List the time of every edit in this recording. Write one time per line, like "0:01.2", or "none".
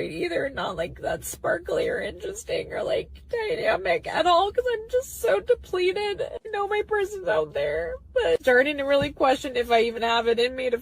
0:02.2
0:06.9